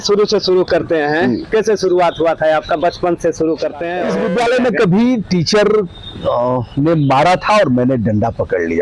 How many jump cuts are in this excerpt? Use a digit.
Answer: 1